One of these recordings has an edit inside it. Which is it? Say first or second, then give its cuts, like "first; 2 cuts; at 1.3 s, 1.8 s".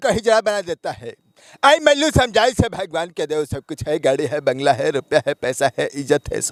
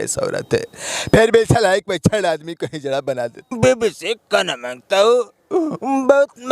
second; 1 cut; at 3.5 s